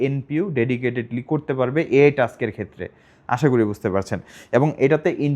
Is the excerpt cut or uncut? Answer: uncut